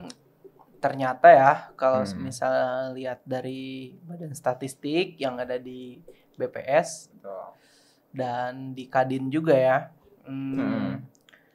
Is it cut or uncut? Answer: uncut